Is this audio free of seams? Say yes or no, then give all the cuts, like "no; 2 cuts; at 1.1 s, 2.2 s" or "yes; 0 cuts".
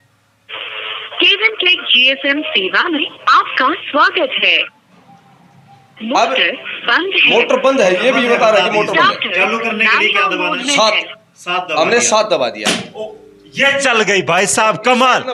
yes; 0 cuts